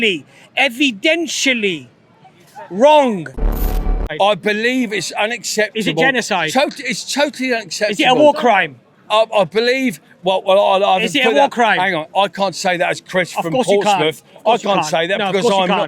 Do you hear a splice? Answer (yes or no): yes